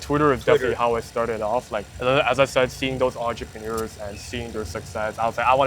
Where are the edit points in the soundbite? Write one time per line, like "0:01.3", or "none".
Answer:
0:01.8